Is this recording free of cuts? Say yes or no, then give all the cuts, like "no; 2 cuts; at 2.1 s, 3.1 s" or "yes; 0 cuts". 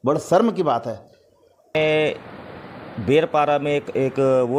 no; 1 cut; at 1.7 s